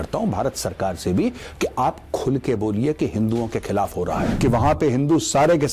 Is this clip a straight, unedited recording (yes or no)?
no